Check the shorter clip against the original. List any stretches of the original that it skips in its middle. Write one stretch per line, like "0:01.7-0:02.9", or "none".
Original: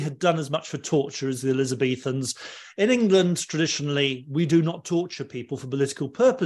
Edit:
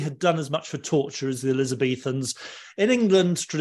none